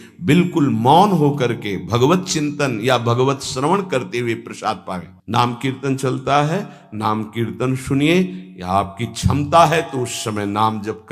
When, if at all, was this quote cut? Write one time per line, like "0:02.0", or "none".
0:05.1